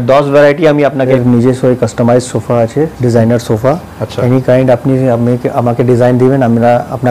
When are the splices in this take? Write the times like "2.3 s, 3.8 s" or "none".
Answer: 1.1 s